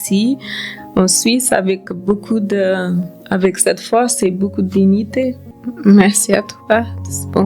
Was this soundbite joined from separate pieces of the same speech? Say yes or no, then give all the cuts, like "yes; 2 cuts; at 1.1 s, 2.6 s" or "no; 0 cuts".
yes; 2 cuts; at 1.8 s, 5.4 s